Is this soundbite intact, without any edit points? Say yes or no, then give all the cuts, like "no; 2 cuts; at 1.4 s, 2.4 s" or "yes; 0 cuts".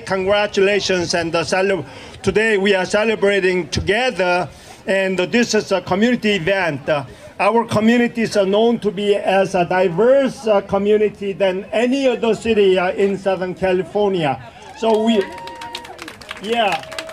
yes; 0 cuts